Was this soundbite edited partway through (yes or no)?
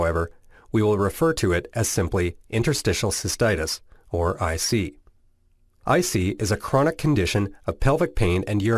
yes